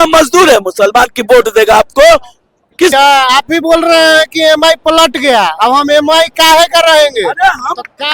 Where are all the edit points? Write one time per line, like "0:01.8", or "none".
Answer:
0:02.9